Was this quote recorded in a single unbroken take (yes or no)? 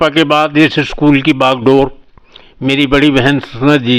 yes